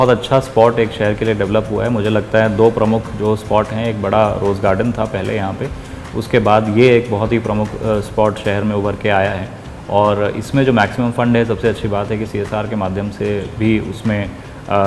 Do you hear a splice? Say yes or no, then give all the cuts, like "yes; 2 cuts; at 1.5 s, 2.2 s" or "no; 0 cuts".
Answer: no; 0 cuts